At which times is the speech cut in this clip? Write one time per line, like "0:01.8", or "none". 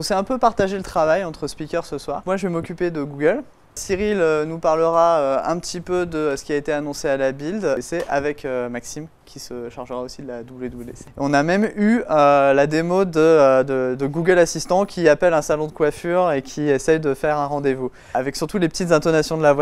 0:02.2
0:03.8
0:07.8
0:11.0
0:18.1

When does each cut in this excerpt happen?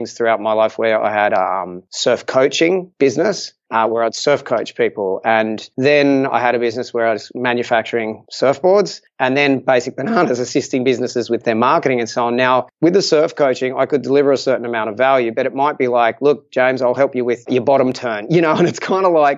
0:03.5

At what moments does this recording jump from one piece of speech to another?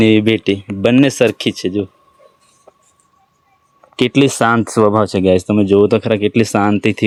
none

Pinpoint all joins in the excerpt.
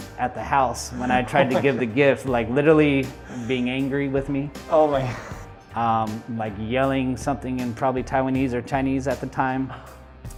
none

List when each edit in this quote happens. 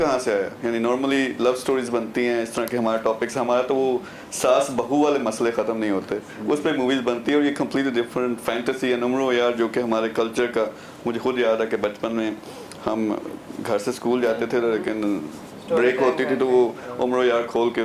none

